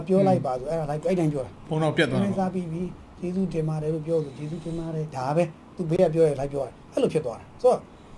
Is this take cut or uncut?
cut